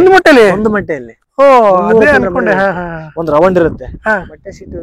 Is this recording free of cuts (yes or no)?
yes